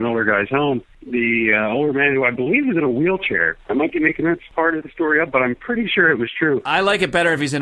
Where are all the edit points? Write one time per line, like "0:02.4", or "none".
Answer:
0:00.9
0:04.5